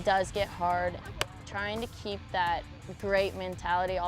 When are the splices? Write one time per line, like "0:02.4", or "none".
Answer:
0:02.9